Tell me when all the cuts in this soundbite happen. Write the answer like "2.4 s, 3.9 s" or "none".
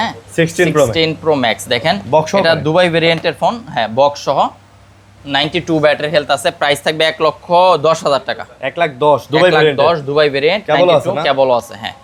none